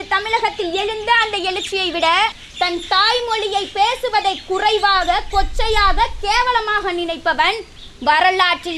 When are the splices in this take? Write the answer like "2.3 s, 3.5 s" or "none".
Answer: 2.4 s